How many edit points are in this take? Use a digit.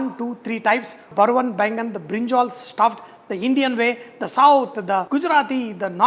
2